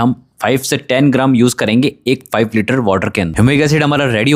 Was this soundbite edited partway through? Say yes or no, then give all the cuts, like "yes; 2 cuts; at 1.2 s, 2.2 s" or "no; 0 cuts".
no; 0 cuts